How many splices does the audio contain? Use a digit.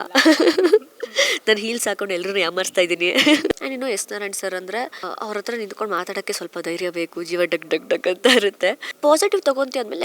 3